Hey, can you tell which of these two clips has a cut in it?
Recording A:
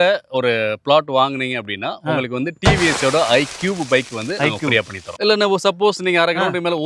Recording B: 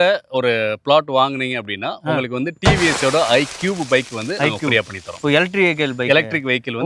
A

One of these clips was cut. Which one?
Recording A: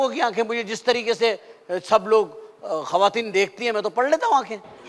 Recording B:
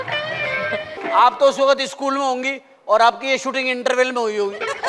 B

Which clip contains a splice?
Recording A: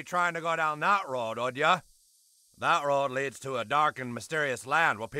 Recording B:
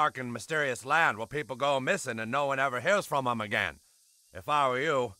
A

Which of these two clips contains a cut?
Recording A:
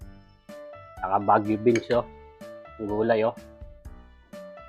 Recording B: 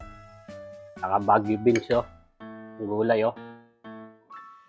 A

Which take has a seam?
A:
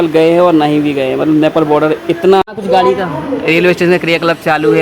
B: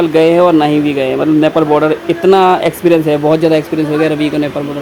A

